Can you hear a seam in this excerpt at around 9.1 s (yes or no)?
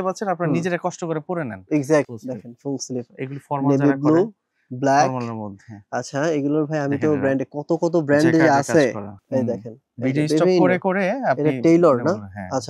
yes